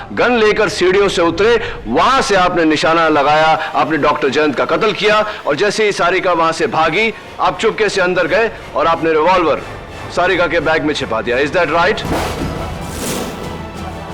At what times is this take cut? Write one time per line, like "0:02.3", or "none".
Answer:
none